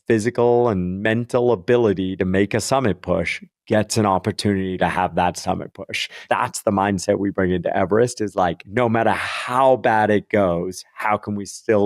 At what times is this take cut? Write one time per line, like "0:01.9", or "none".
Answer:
0:06.2
0:08.6